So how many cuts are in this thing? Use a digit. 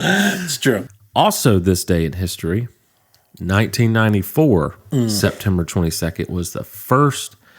1